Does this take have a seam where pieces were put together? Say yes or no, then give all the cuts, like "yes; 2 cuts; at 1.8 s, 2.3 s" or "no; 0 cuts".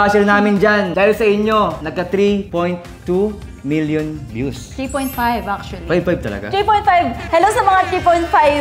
yes; 2 cuts; at 0.9 s, 2.2 s